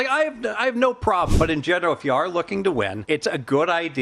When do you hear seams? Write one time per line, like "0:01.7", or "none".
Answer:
0:01.3
0:03.0